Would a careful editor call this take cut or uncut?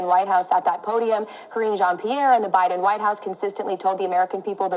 uncut